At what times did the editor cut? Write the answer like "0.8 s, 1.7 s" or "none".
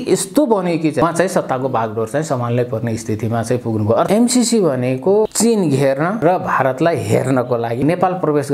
1.0 s, 4.1 s, 5.3 s, 6.2 s, 7.8 s